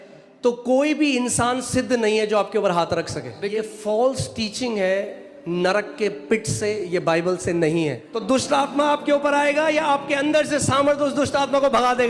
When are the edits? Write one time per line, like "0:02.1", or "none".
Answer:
0:03.5
0:08.1